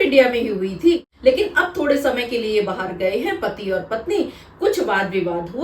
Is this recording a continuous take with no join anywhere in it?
no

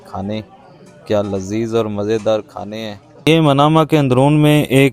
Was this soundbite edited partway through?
yes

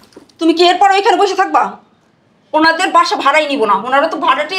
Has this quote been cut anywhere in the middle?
no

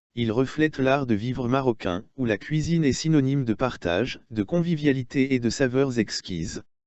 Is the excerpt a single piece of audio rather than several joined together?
yes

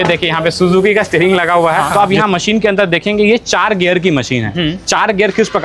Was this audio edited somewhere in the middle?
yes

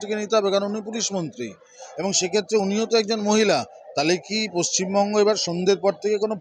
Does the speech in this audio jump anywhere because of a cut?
no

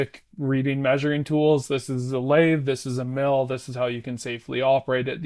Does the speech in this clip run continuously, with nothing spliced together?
yes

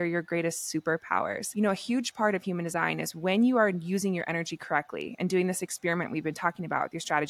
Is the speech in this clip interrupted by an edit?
yes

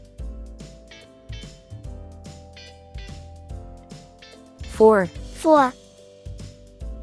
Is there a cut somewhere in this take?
yes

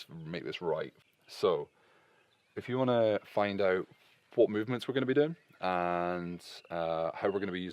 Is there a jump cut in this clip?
yes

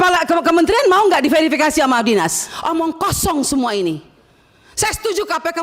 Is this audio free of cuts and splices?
no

